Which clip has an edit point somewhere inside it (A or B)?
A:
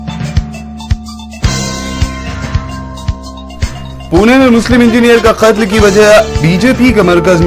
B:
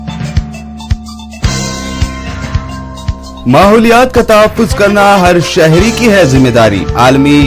B